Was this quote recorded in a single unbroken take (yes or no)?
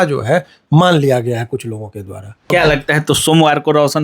no